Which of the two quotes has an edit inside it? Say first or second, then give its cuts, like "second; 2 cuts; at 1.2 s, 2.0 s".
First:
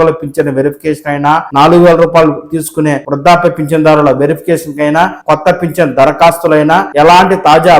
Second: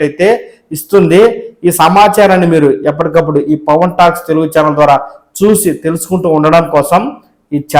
first; 4 cuts; at 1.5 s, 3.1 s, 5.2 s, 6.9 s